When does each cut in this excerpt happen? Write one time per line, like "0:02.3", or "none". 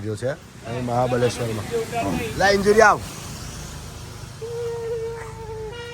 none